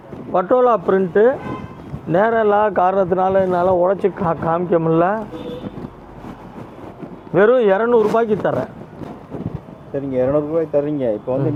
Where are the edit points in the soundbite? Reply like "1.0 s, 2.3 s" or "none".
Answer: none